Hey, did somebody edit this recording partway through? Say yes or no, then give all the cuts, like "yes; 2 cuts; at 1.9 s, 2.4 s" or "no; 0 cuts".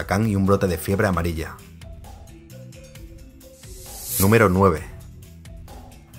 no; 0 cuts